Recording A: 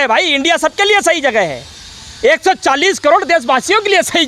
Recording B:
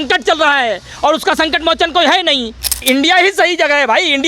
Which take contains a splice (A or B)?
B